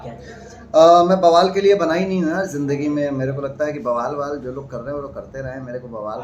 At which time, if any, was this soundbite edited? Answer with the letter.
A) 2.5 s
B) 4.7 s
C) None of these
C